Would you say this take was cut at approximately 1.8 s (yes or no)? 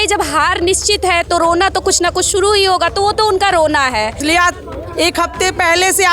no